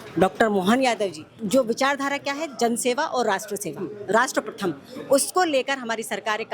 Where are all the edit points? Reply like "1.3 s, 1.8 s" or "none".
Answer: 1.3 s

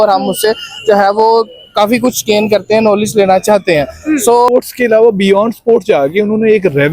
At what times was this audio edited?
4.5 s

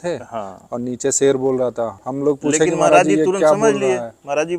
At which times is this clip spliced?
none

